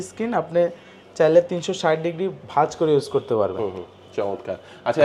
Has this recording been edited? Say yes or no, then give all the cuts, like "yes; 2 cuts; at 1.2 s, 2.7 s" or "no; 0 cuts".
no; 0 cuts